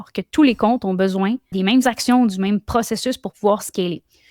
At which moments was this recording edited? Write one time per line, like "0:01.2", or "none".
0:01.5